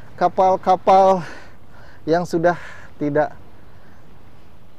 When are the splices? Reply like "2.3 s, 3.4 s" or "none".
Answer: none